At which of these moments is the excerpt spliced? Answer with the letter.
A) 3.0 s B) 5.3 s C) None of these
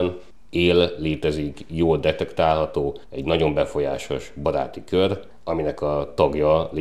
B